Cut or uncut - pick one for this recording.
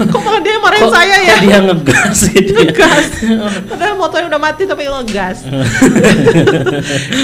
uncut